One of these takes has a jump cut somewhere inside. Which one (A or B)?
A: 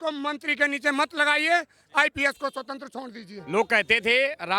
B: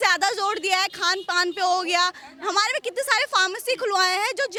A